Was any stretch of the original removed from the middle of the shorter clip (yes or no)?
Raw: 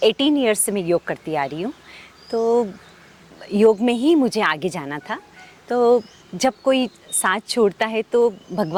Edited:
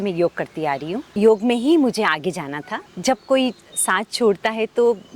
yes